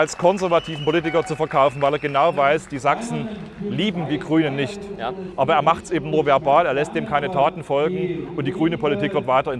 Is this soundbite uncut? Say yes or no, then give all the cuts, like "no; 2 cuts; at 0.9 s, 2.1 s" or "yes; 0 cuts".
yes; 0 cuts